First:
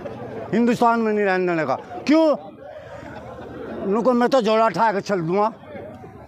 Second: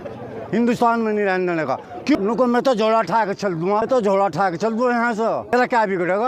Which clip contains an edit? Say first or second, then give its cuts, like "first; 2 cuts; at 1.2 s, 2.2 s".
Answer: second; 3 cuts; at 2.2 s, 3.9 s, 5.5 s